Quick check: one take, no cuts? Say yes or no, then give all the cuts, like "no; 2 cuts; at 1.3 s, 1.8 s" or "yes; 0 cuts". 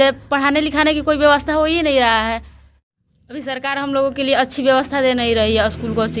no; 1 cut; at 3.1 s